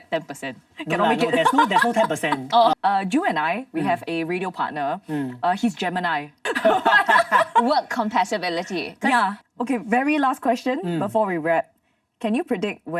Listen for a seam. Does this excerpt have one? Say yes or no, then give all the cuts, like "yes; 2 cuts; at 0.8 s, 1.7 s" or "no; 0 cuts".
yes; 3 cuts; at 2.7 s, 6.3 s, 9.4 s